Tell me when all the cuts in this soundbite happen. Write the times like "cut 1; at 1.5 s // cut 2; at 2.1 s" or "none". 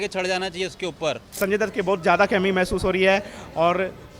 cut 1; at 1.4 s